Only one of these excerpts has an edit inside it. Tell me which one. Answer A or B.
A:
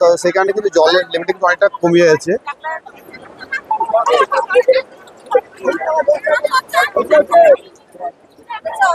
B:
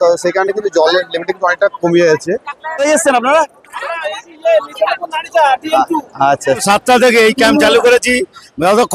B